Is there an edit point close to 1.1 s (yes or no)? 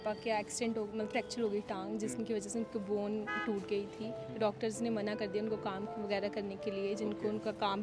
yes